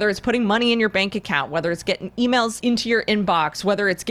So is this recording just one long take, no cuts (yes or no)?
no